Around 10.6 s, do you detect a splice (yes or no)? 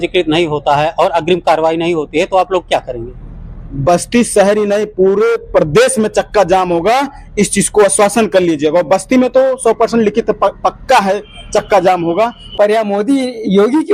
no